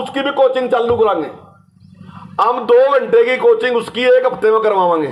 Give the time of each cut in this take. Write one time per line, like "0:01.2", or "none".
none